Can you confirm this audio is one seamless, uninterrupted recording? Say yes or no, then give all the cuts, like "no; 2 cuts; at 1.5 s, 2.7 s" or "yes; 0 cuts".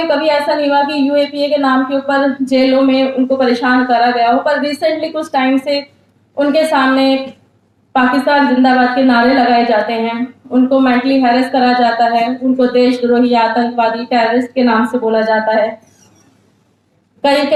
yes; 0 cuts